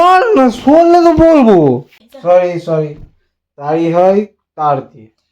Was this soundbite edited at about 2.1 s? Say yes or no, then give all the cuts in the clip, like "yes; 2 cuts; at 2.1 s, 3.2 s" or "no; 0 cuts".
yes; 1 cut; at 2.1 s